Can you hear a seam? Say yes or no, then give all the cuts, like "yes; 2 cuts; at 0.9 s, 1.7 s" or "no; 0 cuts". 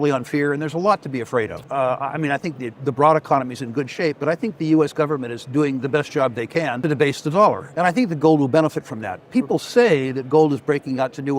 yes; 3 cuts; at 1.6 s, 6.8 s, 7.7 s